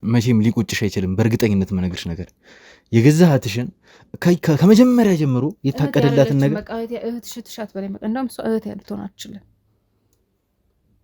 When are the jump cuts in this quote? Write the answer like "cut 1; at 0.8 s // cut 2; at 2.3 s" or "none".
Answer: none

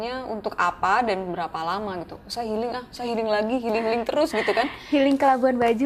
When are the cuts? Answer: none

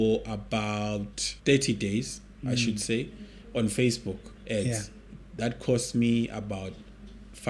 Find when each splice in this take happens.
cut 1; at 1.2 s

